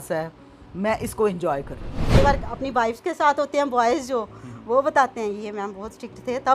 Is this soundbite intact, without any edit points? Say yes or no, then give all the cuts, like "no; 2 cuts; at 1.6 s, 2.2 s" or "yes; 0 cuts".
no; 1 cut; at 2.2 s